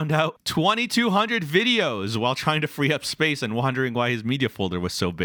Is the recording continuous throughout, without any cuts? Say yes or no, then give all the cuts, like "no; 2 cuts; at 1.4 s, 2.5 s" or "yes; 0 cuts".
yes; 0 cuts